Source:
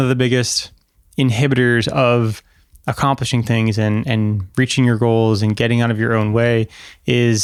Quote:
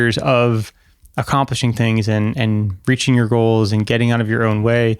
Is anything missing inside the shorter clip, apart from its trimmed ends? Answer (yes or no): no